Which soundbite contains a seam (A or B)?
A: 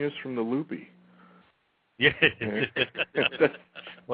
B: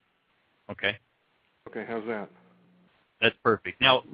B